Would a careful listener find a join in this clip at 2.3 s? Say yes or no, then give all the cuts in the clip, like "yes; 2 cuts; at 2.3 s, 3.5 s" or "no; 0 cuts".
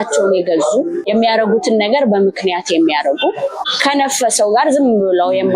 no; 2 cuts; at 1.0 s, 3.7 s